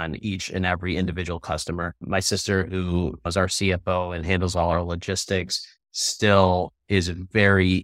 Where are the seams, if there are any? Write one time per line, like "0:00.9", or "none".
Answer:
0:03.2